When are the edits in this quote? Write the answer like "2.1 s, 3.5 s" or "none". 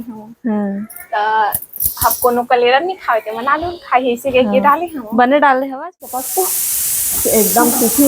6.2 s